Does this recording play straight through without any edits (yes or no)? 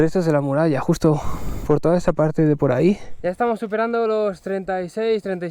no